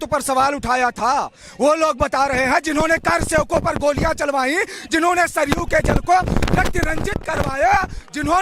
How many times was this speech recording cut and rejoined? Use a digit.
0